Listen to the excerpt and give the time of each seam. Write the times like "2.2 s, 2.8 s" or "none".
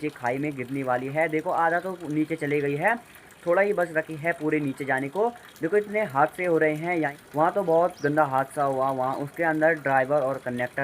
7.1 s